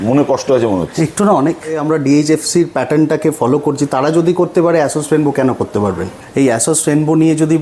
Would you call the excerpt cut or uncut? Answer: cut